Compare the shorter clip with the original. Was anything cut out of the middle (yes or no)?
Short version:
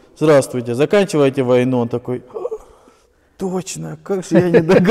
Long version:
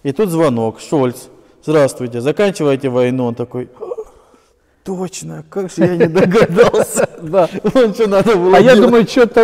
no